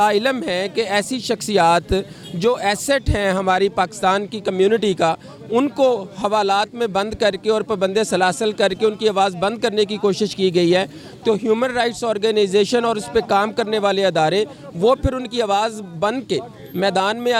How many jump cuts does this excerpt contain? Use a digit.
0